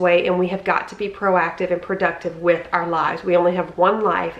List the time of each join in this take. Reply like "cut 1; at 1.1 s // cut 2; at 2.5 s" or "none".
none